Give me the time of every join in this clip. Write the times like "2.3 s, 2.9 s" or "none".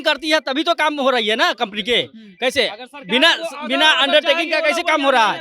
none